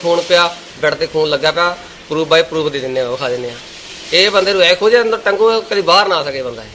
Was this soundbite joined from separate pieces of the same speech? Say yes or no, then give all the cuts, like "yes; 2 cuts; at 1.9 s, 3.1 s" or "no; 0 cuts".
no; 0 cuts